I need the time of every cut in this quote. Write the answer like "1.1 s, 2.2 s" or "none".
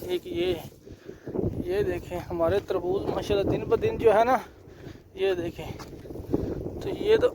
6.0 s